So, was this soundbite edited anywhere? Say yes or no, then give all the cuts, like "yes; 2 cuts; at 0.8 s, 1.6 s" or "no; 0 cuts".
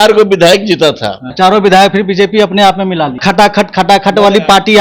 yes; 2 cuts; at 1.2 s, 3.2 s